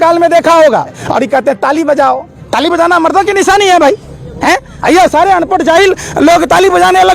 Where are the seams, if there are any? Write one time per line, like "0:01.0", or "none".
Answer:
0:01.0